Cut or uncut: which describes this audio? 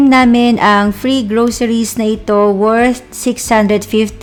uncut